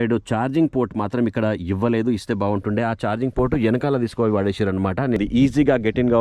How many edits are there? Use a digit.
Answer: 1